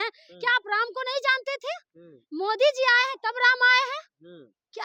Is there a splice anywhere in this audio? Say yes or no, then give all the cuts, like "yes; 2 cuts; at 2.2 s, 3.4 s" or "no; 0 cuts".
no; 0 cuts